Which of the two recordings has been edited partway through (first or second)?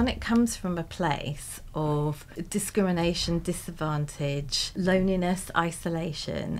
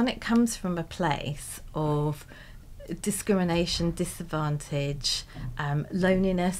first